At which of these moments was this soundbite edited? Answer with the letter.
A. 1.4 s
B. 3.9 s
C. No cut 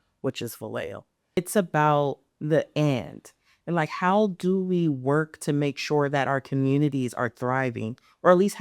A